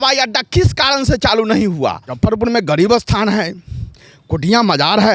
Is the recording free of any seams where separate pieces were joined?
no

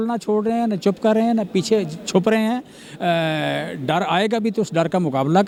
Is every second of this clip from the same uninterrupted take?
yes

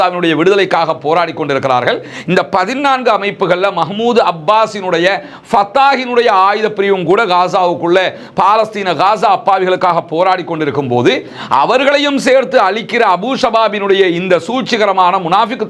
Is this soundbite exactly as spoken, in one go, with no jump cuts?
yes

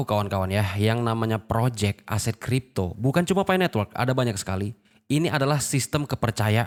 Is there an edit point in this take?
no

